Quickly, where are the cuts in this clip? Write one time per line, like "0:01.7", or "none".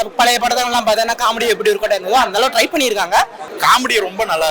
0:03.4